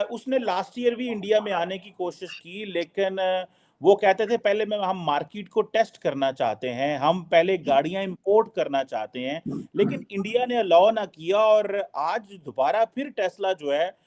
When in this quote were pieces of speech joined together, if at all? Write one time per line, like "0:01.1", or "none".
none